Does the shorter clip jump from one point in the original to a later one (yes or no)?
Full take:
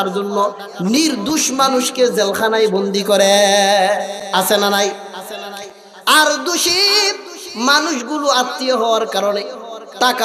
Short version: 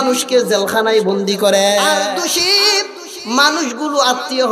yes